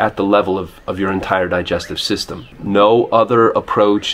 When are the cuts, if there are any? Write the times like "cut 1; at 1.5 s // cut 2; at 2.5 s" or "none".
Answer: cut 1; at 2.5 s